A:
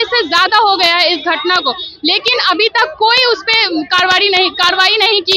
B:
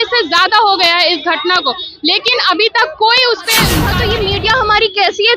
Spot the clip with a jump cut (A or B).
B